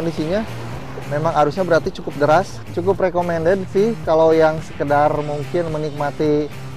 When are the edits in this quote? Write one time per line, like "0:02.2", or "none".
0:02.6